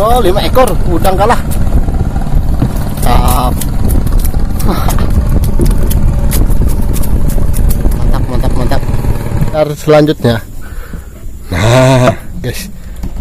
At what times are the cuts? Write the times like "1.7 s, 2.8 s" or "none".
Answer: 9.5 s